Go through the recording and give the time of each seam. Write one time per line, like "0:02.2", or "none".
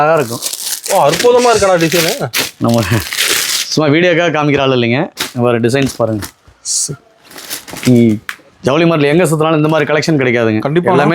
none